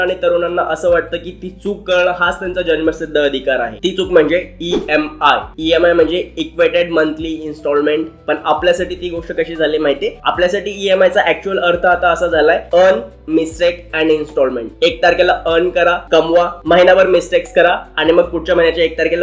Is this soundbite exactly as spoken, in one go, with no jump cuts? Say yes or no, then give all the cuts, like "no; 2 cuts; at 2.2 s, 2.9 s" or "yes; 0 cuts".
yes; 0 cuts